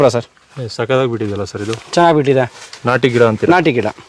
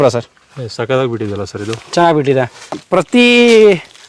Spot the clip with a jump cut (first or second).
second